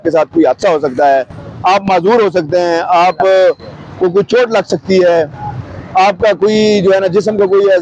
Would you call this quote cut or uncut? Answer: uncut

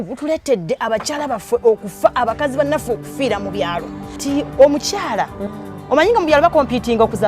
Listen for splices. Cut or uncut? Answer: cut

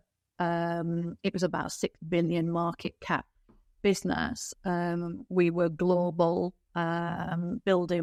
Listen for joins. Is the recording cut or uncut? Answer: uncut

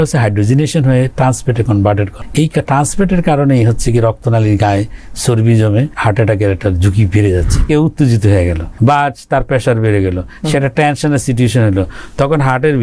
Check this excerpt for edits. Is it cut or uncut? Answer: cut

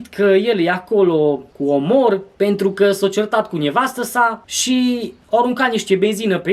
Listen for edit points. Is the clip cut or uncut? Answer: uncut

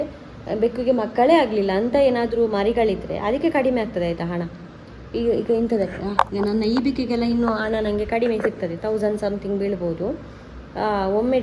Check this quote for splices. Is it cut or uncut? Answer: uncut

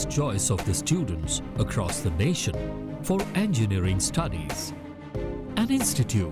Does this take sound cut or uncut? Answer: cut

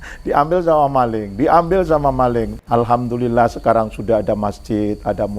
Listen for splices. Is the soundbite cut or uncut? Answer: cut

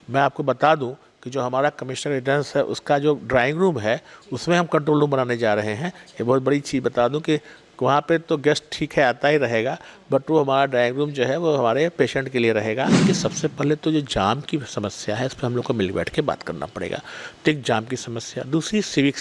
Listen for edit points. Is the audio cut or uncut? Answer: cut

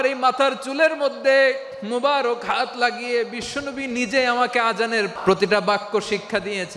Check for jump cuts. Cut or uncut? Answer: cut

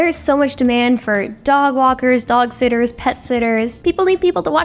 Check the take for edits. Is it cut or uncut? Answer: cut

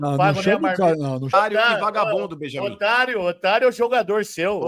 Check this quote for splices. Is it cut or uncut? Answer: cut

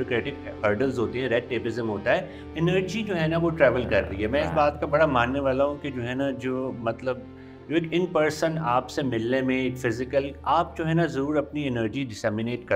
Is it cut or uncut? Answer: cut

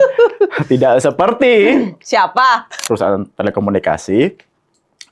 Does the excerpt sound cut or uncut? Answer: cut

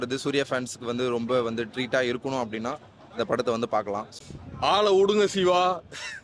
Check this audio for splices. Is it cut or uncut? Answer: cut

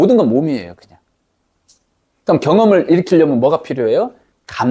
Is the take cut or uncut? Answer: uncut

